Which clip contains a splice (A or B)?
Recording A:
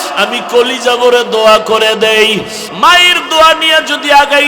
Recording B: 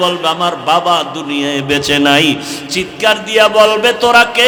A